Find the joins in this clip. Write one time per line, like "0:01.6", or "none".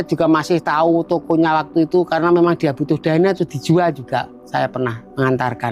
none